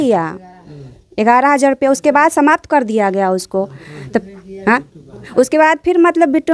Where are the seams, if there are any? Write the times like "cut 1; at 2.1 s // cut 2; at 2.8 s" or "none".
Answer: none